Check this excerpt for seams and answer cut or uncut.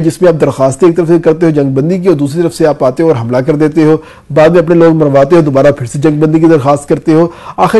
uncut